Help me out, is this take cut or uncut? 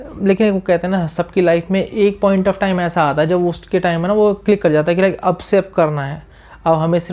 uncut